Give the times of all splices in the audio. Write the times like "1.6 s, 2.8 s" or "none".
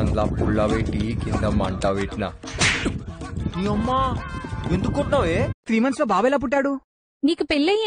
5.5 s